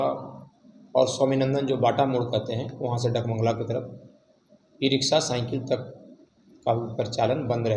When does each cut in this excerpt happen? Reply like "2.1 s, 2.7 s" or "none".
none